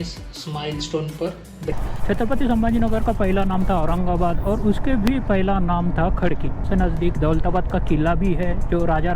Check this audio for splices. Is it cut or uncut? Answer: cut